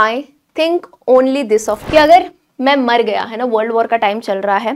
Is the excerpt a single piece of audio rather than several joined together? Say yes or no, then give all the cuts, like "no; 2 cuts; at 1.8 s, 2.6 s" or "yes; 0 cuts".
no; 1 cut; at 1.8 s